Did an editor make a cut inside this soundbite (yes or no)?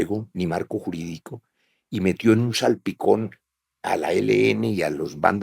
no